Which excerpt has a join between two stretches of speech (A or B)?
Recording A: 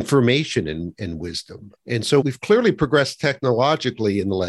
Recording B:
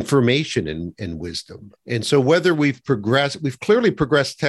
A